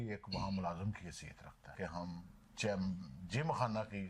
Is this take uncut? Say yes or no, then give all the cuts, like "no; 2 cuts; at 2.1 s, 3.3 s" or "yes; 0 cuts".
no; 1 cut; at 1.8 s